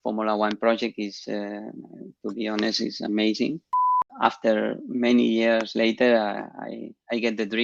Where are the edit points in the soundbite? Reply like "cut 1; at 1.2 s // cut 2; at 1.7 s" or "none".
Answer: cut 1; at 4.0 s